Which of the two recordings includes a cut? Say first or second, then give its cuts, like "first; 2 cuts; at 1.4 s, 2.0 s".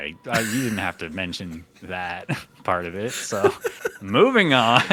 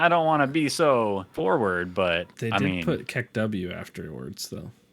second; 2 cuts; at 1.3 s, 2.3 s